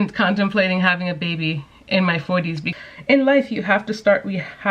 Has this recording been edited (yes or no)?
yes